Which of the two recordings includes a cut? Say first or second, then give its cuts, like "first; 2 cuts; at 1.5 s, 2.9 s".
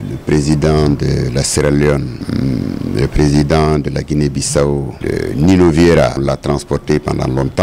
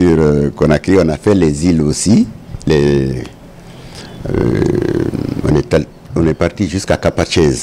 first; 3 cuts; at 2.2 s, 4.9 s, 6.2 s